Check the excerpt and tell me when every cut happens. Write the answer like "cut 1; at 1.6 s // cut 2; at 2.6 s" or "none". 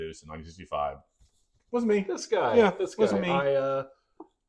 none